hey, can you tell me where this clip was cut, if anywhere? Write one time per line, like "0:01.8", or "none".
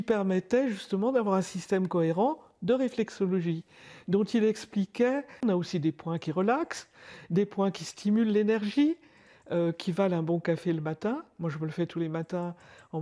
0:05.4